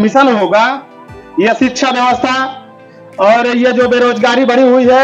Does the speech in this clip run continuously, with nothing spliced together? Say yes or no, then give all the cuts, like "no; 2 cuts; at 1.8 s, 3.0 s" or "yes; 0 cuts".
yes; 0 cuts